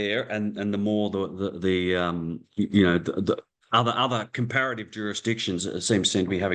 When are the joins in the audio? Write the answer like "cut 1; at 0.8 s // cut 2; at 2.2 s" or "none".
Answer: none